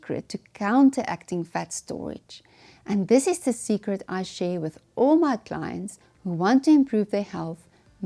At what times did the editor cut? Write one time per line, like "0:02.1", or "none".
none